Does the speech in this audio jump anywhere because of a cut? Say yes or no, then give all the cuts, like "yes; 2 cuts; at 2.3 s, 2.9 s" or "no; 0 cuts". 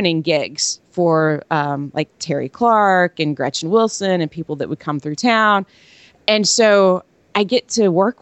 no; 0 cuts